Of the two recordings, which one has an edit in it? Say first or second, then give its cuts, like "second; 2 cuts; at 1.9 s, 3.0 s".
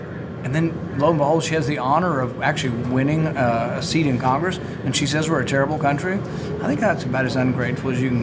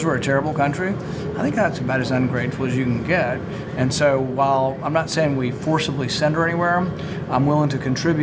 first; 1 cut; at 4.0 s